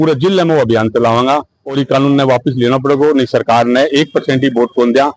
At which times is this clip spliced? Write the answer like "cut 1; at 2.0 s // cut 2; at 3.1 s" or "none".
none

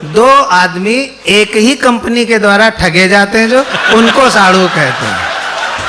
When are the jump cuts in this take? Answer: none

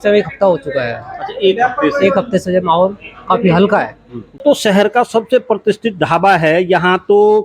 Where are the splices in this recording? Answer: cut 1; at 4.4 s

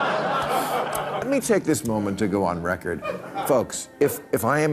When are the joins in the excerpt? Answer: cut 1; at 1.2 s

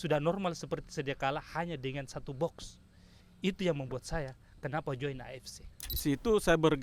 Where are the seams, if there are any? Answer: cut 1; at 5.9 s

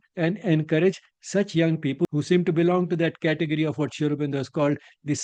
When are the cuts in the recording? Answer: cut 1; at 2.1 s

